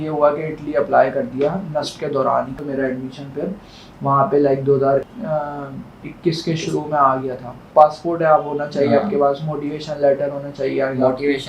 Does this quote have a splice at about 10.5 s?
no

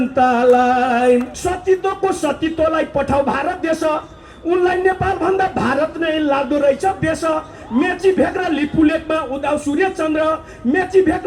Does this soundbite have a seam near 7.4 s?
no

